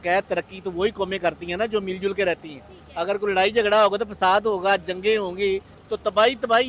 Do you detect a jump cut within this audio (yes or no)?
no